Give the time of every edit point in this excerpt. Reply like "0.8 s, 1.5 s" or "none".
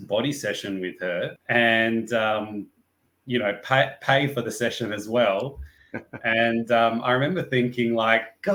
none